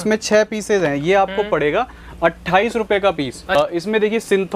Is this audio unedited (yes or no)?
no